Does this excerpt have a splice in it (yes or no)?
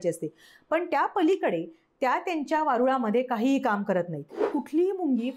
yes